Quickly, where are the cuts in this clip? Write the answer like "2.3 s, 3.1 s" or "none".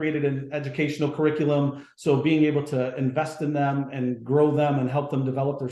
none